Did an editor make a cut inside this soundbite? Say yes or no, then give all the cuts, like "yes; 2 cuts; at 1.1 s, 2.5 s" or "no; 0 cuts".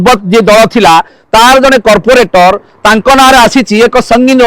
no; 0 cuts